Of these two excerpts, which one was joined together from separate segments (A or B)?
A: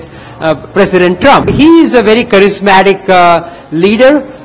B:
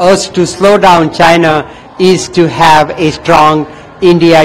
A